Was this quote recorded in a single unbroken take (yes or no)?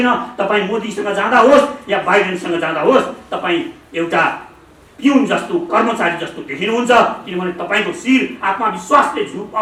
yes